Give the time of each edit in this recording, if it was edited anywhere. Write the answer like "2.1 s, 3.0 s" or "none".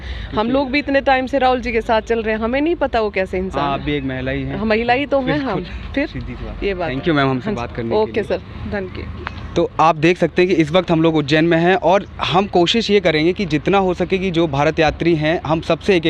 none